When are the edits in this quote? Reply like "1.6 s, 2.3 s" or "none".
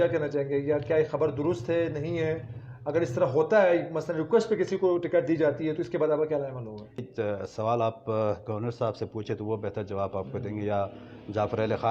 7.1 s